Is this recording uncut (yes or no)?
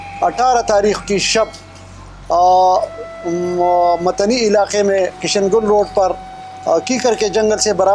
yes